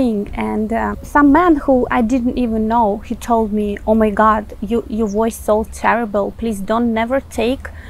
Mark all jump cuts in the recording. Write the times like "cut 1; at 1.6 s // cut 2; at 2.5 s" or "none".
cut 1; at 1.0 s